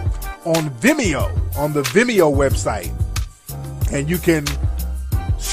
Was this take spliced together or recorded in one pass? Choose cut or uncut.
cut